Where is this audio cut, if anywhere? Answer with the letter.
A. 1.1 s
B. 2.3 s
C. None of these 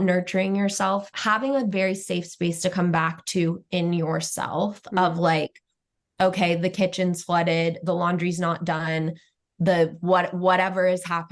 A